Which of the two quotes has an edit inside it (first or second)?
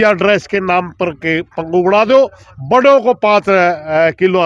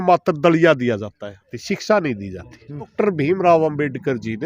second